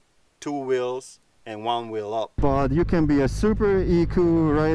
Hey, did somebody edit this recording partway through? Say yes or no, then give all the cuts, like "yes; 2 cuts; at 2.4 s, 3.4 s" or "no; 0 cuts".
yes; 1 cut; at 2.3 s